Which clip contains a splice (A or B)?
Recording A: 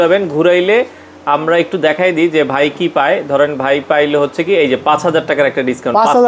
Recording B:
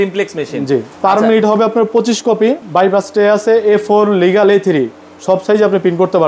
B